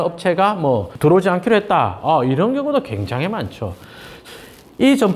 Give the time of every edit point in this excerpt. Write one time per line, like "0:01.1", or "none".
0:04.2